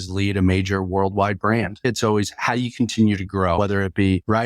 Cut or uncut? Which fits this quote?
cut